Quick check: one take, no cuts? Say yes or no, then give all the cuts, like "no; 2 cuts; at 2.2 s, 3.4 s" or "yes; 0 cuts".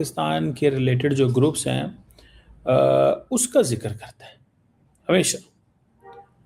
yes; 0 cuts